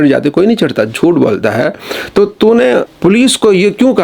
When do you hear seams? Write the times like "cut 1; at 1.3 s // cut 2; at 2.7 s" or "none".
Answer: cut 1; at 2.9 s